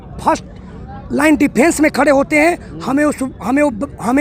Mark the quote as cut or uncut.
uncut